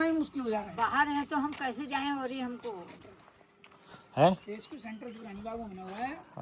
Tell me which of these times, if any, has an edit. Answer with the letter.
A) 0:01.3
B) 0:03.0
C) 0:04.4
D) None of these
B